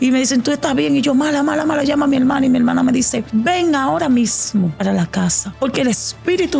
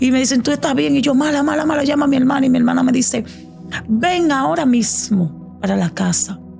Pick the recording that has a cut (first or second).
first